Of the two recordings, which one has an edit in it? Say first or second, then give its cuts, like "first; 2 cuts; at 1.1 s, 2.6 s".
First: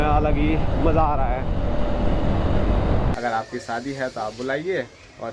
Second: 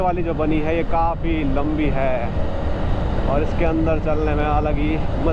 first; 1 cut; at 3.1 s